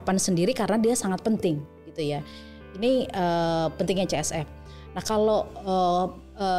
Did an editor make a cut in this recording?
no; 0 cuts

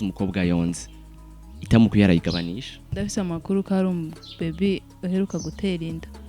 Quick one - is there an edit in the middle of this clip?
yes; 1 cut; at 2.8 s

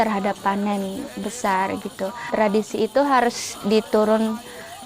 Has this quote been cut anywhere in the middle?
yes; 1 cut; at 2.3 s

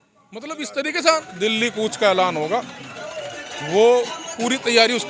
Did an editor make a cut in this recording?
yes; 1 cut; at 1.0 s

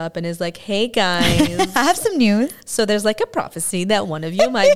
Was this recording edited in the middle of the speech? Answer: no; 0 cuts

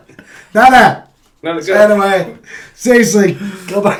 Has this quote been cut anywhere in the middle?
no; 0 cuts

